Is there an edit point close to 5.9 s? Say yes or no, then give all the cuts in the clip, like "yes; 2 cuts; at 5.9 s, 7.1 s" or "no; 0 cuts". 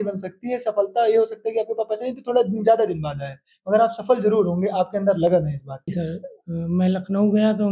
yes; 1 cut; at 5.9 s